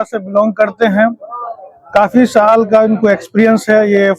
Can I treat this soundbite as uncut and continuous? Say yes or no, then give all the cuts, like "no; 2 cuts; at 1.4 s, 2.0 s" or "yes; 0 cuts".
yes; 0 cuts